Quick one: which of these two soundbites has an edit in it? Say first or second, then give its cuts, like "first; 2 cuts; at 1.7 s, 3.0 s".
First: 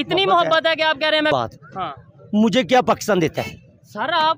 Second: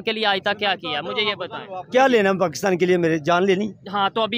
first; 1 cut; at 1.3 s